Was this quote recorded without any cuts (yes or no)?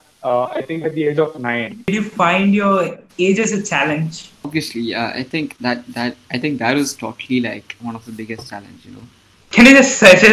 no